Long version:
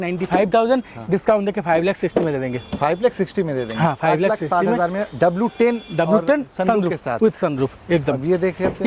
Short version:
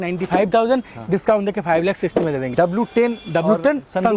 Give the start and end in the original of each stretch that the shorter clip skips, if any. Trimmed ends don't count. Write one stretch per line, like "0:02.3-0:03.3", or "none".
0:02.5-0:05.1